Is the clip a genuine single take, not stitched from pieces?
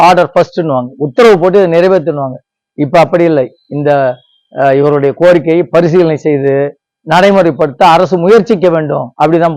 yes; 0 cuts

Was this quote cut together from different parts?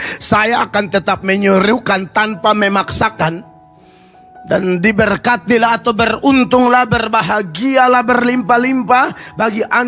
no; 0 cuts

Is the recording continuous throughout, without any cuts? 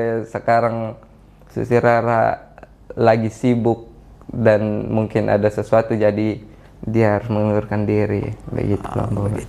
yes; 0 cuts

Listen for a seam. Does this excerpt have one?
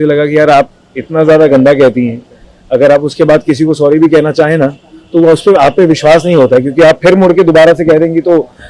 no; 0 cuts

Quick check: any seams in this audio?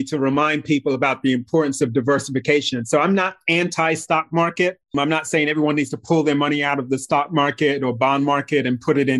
yes; 1 cut; at 4.8 s

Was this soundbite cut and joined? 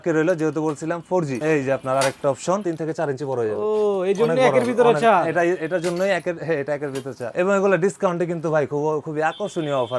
yes; 3 cuts; at 1.4 s, 2.6 s, 7.3 s

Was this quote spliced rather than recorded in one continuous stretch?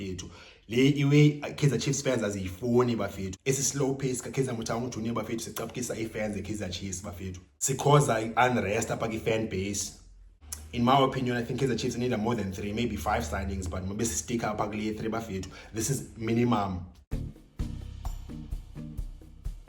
yes; 1 cut; at 17.0 s

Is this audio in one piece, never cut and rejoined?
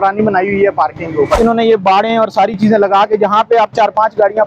no; 1 cut; at 1.4 s

